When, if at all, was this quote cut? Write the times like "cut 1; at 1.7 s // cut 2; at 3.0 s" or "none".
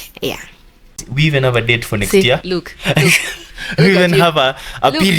cut 1; at 1.1 s